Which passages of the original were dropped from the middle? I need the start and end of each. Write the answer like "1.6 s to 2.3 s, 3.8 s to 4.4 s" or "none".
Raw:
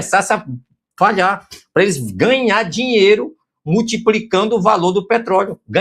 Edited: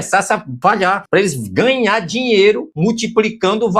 0.8 s to 1.5 s, 3.3 s to 3.6 s